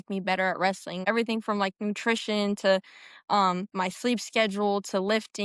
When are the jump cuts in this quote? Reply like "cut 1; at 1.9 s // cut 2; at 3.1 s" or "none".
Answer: cut 1; at 1.0 s